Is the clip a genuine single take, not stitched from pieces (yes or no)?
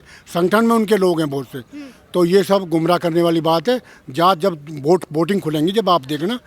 yes